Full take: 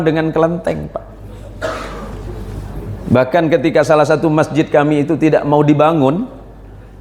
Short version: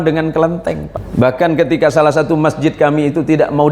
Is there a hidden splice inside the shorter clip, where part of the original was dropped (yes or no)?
yes